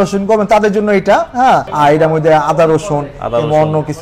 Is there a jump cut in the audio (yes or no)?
yes